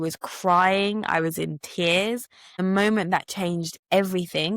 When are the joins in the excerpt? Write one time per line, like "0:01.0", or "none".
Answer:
0:02.6

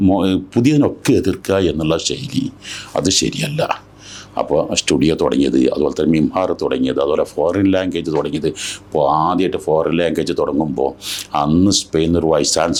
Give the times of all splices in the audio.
none

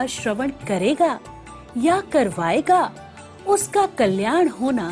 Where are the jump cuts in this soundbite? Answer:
none

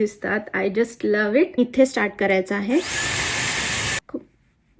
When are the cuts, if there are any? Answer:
0:01.6
0:04.0

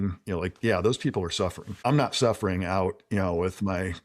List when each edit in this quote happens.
0:01.7

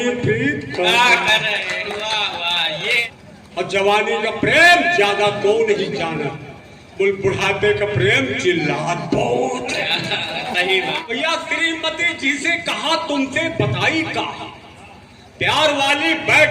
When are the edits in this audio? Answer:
0:03.1
0:11.0

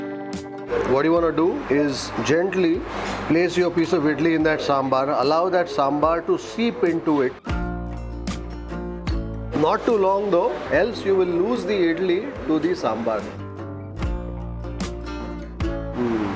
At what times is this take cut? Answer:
none

